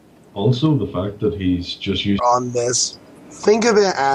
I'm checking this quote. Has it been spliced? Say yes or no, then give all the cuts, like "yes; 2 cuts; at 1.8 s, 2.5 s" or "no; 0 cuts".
no; 0 cuts